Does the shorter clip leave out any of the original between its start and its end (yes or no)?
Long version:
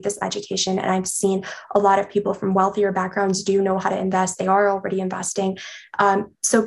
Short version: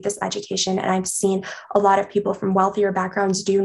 no